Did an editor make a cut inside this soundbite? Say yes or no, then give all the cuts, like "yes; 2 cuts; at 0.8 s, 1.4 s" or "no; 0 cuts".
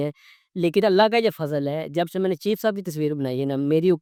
no; 0 cuts